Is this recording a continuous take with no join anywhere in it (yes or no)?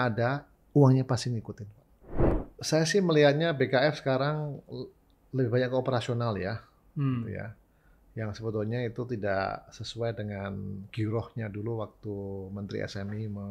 no